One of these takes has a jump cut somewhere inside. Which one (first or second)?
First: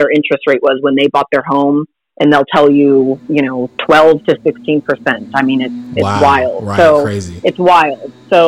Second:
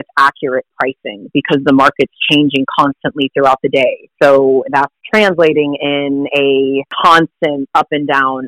second